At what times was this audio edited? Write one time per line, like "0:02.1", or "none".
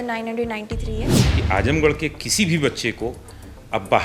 0:01.2